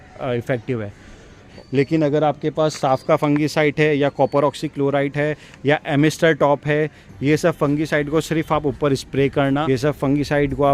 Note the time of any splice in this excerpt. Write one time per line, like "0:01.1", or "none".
0:01.4
0:09.6